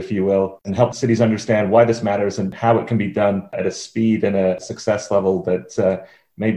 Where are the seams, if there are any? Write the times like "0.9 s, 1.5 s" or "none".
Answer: 0.9 s, 2.5 s, 3.6 s, 4.6 s